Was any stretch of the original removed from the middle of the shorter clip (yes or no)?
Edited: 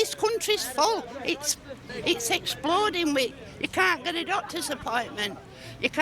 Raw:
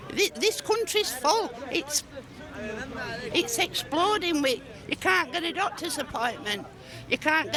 yes